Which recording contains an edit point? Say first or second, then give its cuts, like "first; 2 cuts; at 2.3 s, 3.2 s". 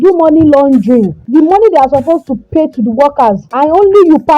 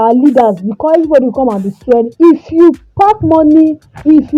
first; 2 cuts; at 1.2 s, 3.5 s